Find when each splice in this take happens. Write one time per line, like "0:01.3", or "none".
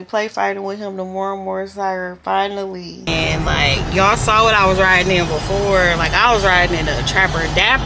0:03.1